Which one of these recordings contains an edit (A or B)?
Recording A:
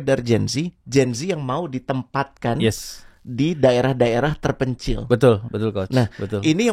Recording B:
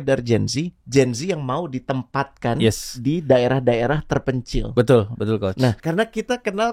B